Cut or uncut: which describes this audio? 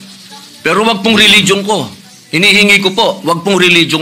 uncut